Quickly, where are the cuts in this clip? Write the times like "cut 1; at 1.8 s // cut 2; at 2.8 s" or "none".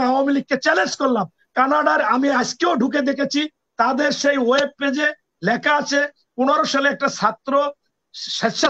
none

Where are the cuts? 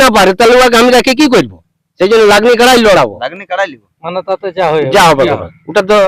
none

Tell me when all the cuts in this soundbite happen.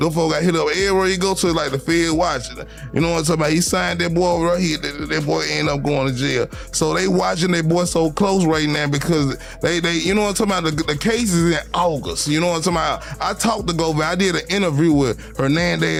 none

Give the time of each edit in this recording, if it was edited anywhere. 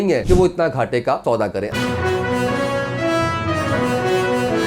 cut 1; at 1.2 s

